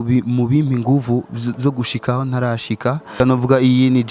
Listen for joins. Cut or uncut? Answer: cut